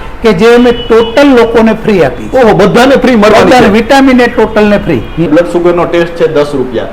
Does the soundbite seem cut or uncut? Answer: cut